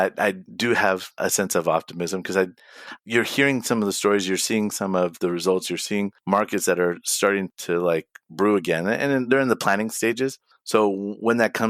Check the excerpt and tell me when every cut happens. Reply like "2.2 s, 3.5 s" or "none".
1.2 s